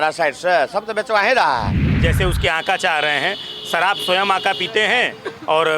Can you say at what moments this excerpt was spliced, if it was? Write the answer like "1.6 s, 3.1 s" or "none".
1.8 s